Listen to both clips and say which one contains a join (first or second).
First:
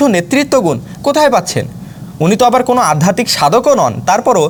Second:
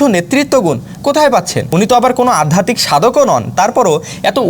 second